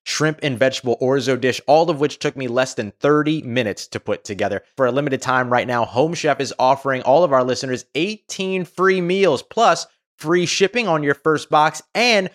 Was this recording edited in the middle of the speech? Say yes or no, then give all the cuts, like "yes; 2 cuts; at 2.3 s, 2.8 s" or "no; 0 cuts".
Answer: no; 0 cuts